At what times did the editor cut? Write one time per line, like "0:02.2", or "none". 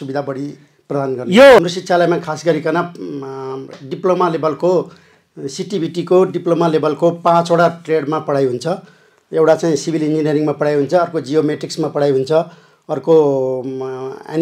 0:01.6